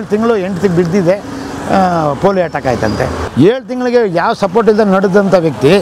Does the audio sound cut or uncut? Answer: uncut